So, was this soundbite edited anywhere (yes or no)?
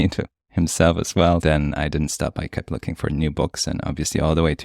yes